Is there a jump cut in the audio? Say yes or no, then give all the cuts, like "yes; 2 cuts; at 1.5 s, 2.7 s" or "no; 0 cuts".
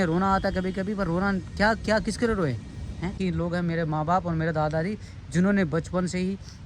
yes; 1 cut; at 3.2 s